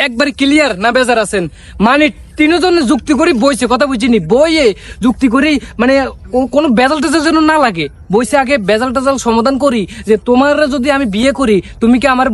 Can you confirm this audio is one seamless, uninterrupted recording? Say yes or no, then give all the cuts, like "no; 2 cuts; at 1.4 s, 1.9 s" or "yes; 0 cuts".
yes; 0 cuts